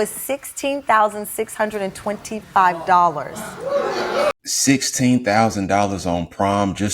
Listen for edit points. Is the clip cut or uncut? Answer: cut